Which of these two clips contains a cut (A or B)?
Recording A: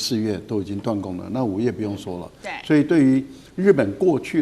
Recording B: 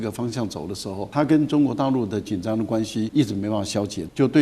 B